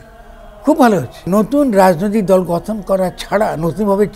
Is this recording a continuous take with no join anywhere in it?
no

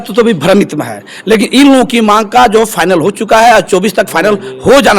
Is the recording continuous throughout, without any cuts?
yes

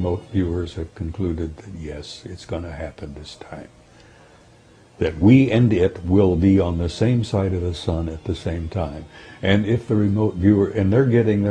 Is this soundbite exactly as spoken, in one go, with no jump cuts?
yes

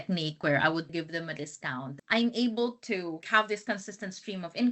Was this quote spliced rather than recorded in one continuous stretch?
yes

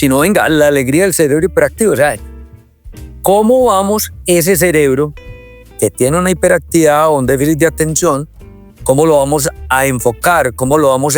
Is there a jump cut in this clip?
no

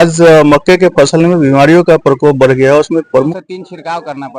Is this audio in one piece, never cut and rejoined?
no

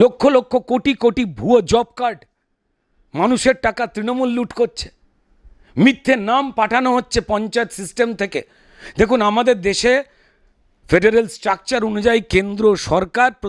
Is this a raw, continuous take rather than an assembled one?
yes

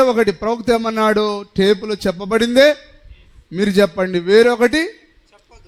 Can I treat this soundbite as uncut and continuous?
yes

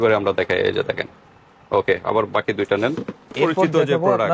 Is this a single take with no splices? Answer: no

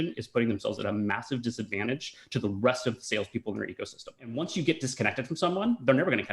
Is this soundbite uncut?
no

